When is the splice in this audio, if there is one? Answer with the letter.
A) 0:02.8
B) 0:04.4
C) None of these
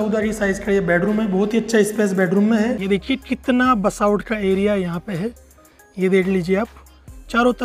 A